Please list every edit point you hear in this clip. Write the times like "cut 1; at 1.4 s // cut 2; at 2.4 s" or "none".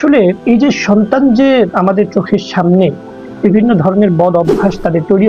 cut 1; at 1.7 s